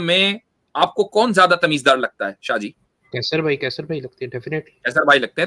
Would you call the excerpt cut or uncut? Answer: uncut